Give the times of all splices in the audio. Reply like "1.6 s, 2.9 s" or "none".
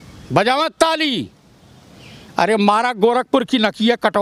none